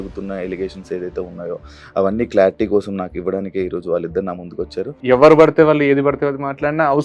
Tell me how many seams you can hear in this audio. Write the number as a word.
one